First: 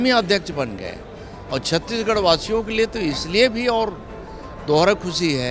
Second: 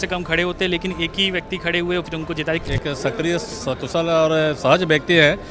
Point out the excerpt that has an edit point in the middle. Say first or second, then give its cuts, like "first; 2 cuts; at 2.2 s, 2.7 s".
second; 1 cut; at 2.6 s